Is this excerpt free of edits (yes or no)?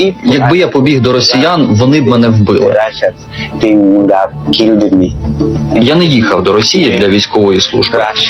yes